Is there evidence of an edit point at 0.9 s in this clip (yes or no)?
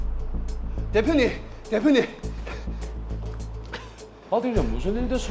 yes